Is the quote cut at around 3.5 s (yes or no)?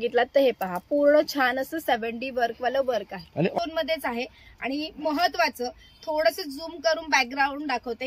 yes